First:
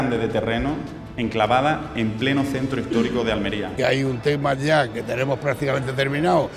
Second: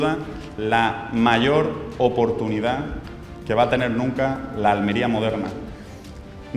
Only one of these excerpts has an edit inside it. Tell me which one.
first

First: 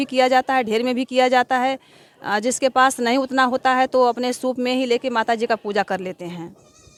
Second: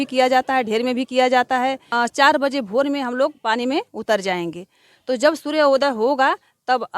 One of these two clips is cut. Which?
second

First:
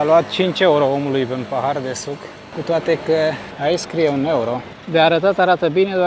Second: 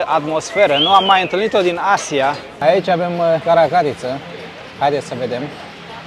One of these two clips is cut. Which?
second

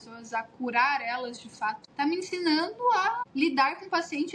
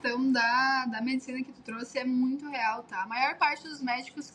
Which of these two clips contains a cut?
first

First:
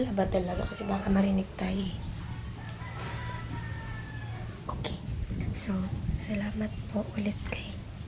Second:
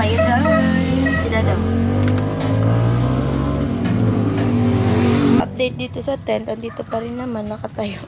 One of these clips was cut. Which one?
second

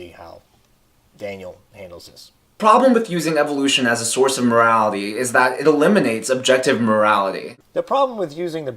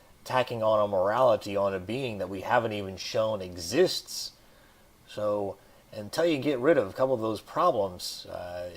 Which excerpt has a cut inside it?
first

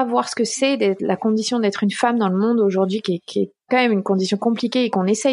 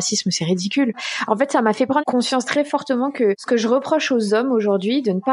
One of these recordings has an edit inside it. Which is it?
second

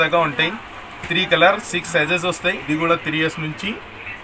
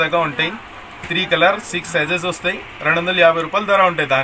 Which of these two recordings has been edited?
first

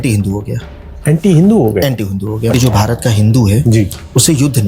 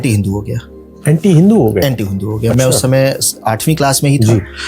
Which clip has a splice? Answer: first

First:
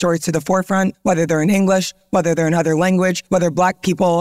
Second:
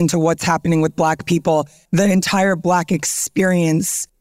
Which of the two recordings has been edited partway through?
second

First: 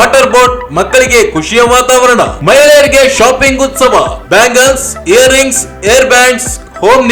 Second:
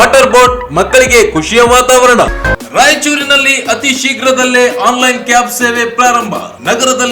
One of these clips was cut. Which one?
second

